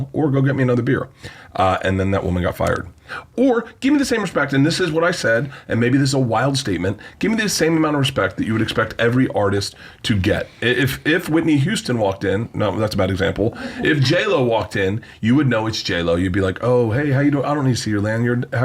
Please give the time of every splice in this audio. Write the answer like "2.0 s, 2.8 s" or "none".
3.2 s